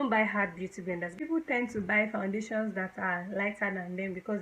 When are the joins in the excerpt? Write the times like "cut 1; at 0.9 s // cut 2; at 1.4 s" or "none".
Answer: cut 1; at 1.1 s

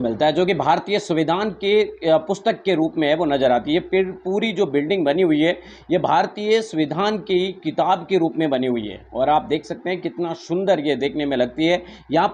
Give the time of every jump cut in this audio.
none

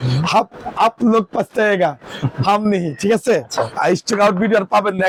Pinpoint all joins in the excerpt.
none

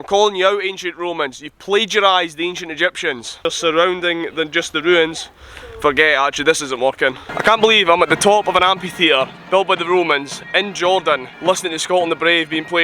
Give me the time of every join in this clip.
cut 1; at 3.4 s // cut 2; at 7.4 s // cut 3; at 11.3 s

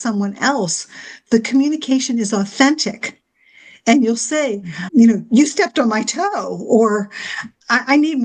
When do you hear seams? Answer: none

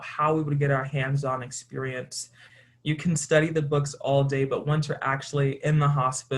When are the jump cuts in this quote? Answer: cut 1; at 2.4 s

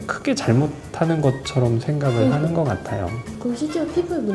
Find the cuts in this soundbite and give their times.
cut 1; at 3.3 s

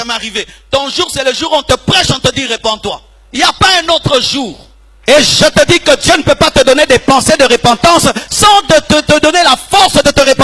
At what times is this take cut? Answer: cut 1; at 4.9 s

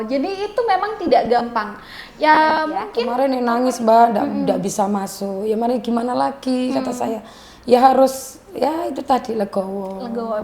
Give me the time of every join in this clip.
cut 1; at 3.0 s

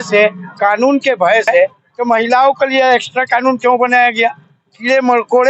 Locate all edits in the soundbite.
cut 1; at 1.9 s

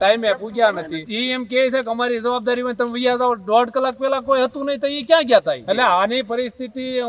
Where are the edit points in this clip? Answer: cut 1; at 1.1 s // cut 2; at 5.6 s

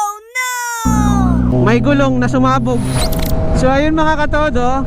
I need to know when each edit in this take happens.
cut 1; at 1.5 s // cut 2; at 3.0 s

